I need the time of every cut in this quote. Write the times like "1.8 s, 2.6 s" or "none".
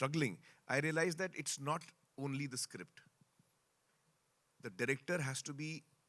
none